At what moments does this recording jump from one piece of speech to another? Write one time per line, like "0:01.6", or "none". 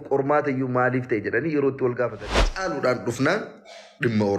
0:02.5